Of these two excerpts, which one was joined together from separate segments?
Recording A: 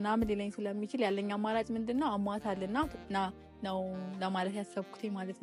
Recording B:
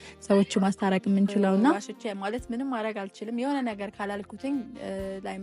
B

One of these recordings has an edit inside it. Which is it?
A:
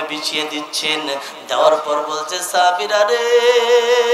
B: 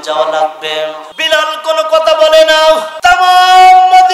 B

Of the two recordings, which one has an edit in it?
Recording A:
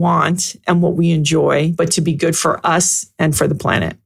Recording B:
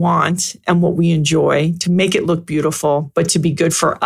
A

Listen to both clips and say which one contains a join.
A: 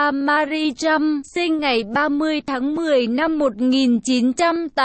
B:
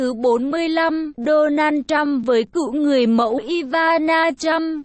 A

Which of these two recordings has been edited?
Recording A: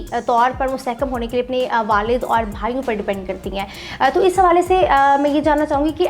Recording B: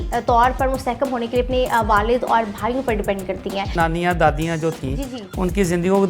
B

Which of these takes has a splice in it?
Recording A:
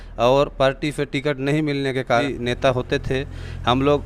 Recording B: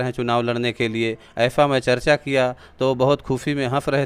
A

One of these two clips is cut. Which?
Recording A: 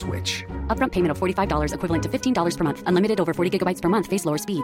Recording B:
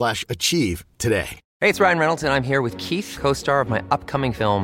B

